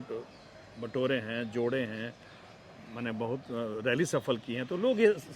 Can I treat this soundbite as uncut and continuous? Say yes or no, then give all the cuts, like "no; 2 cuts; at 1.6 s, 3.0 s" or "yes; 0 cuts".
yes; 0 cuts